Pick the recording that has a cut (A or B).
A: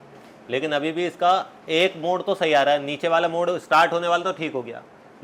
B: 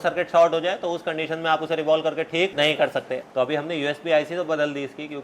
B